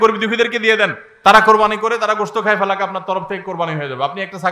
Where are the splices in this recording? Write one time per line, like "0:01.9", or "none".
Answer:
none

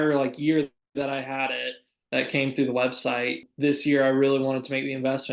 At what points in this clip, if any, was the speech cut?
0:03.5

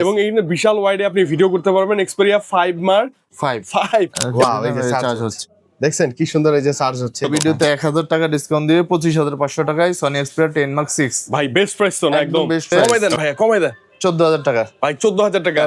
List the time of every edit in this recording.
0:04.2
0:07.3
0:12.7

